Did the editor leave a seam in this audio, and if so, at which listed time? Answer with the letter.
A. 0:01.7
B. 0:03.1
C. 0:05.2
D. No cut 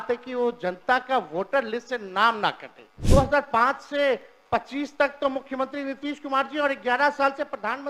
B